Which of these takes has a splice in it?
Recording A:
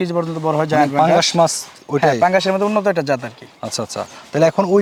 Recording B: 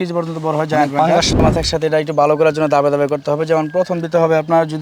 B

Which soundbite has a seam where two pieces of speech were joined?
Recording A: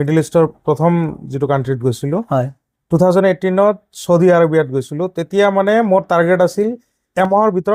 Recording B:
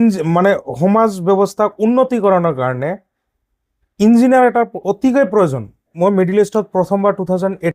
B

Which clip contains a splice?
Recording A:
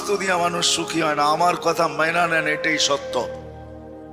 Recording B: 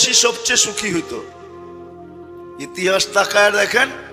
B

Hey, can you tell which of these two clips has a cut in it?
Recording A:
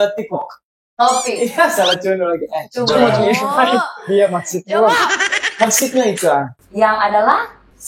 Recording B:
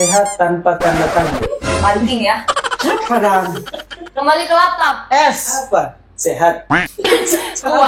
A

